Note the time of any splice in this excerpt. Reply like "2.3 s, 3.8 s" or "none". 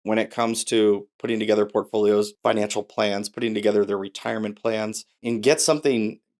2.3 s, 5.2 s